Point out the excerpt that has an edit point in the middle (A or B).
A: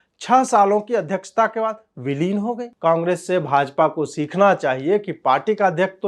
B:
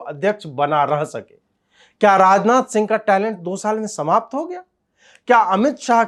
A